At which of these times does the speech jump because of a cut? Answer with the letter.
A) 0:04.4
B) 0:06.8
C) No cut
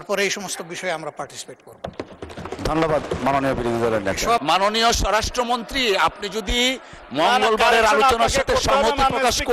A